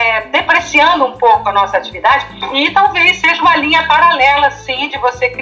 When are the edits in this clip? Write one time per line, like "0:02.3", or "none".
0:02.3